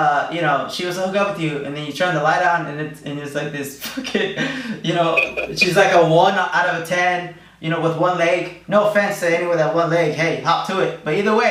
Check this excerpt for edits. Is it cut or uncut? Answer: uncut